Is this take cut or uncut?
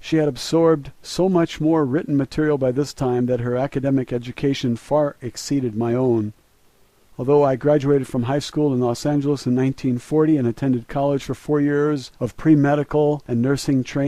cut